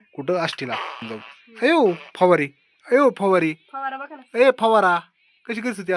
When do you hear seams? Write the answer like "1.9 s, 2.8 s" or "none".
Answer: 1.0 s